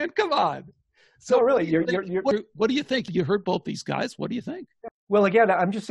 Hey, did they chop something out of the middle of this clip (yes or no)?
yes